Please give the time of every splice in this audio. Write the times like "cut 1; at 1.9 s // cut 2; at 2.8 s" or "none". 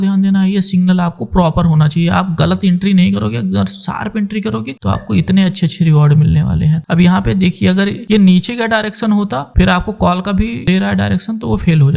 none